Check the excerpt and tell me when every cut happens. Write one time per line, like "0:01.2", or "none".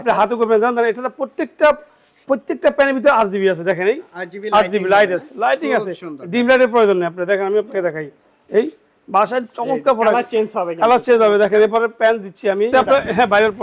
0:12.7